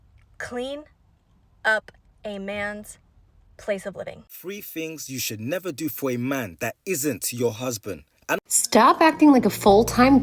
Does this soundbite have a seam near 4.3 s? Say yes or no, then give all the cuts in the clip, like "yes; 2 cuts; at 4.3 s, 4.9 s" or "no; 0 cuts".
yes; 2 cuts; at 4.3 s, 8.4 s